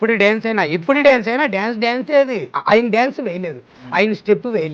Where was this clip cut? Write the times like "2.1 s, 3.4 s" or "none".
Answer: 2.5 s